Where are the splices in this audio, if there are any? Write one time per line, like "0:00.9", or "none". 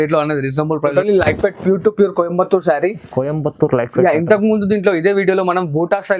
0:00.9

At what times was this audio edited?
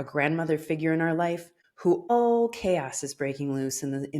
0:02.1

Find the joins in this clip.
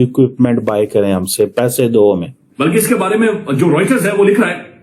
0:02.4

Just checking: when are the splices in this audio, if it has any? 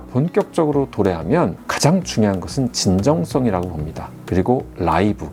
none

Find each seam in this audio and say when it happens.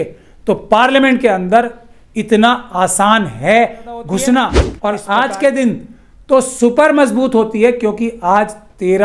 0:04.6

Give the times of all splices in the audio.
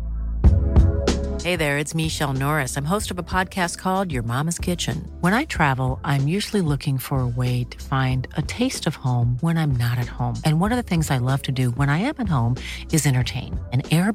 none

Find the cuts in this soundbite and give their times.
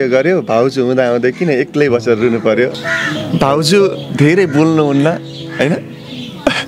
0:02.8

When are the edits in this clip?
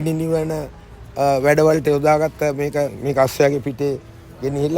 0:03.0

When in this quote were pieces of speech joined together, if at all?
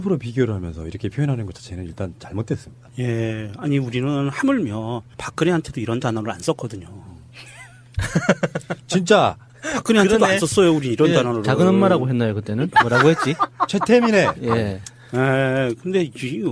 none

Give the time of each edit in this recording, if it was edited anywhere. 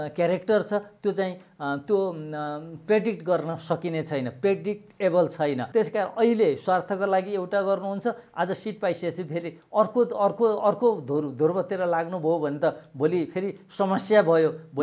0:05.6

